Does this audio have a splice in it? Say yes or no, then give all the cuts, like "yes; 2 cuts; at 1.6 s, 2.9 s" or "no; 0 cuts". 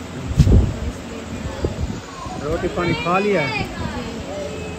no; 0 cuts